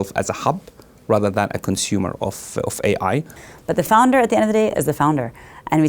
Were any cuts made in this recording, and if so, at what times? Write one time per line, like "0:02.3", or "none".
0:03.4